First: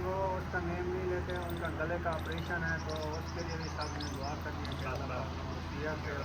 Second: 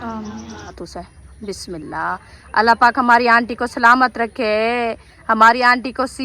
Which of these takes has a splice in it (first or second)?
second